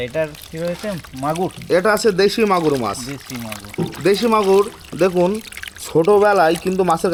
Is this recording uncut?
yes; 0 cuts

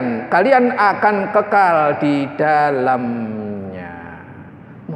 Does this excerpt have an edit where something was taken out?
no; 0 cuts

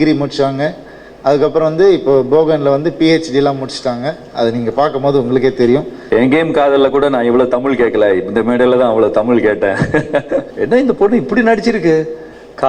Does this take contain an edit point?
yes; 2 cuts; at 6.0 s, 10.5 s

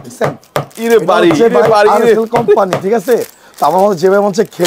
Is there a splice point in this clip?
no; 0 cuts

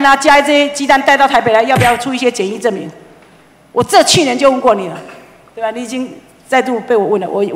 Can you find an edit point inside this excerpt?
no; 0 cuts

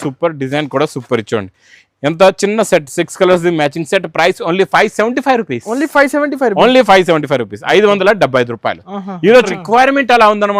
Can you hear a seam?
yes; 1 cut; at 9.5 s

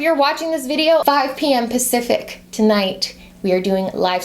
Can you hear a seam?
yes; 1 cut; at 1.0 s

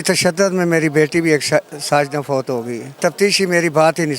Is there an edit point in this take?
yes; 1 cut; at 2.8 s

